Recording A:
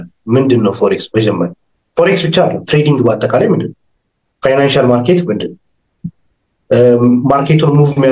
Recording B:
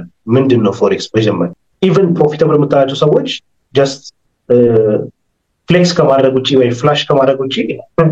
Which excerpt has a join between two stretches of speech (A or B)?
B